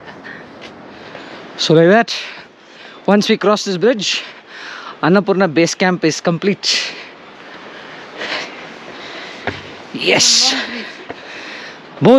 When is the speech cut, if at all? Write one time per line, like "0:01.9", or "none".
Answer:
0:01.1